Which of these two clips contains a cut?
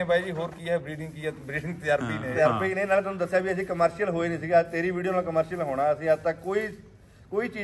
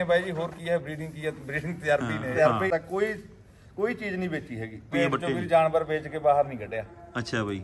second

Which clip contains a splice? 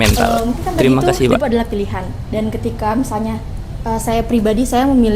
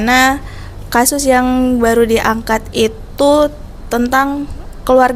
first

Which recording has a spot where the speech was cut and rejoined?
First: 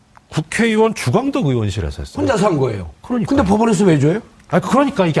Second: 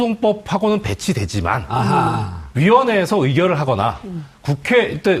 first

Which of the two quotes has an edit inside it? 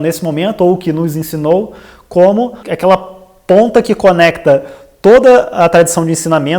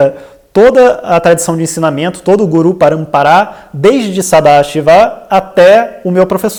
first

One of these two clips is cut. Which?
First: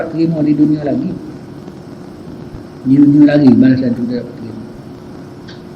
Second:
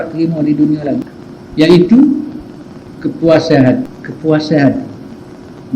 second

